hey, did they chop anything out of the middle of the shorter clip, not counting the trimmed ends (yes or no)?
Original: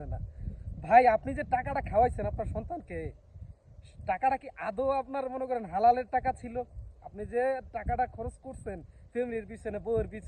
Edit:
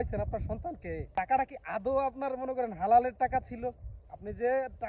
yes